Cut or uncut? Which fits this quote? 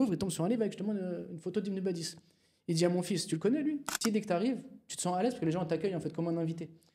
cut